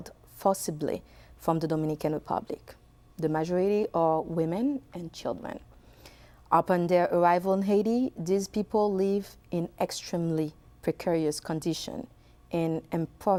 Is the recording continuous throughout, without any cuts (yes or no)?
yes